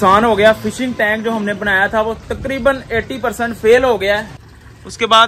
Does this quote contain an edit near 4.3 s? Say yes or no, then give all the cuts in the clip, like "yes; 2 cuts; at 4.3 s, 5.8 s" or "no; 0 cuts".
yes; 1 cut; at 4.3 s